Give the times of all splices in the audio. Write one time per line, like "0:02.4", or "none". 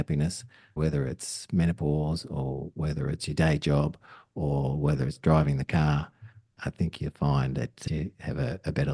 0:00.8
0:07.8